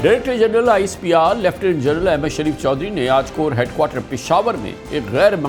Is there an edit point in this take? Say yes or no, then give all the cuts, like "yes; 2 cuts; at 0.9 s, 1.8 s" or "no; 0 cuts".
no; 0 cuts